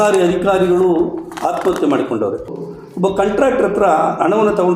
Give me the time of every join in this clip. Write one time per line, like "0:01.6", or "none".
0:02.5

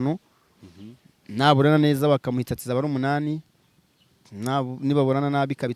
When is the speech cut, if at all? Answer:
none

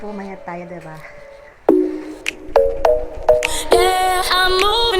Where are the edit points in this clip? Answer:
0:01.4

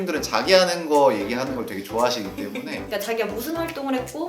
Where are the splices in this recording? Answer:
0:02.9

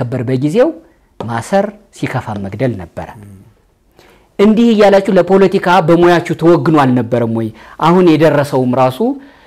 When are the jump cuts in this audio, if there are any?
none

